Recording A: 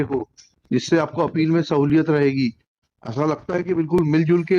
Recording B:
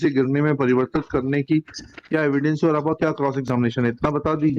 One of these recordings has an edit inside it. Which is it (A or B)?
A